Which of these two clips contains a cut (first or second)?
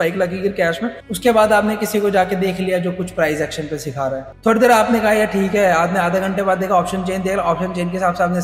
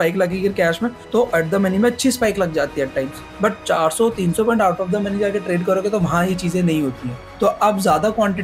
first